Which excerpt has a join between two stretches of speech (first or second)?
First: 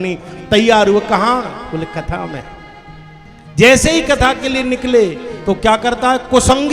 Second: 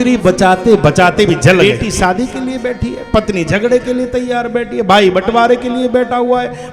second